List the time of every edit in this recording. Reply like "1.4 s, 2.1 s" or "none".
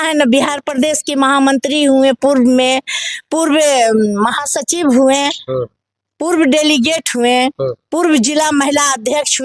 none